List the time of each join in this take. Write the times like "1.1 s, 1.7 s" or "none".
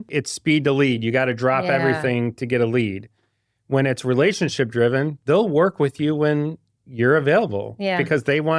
none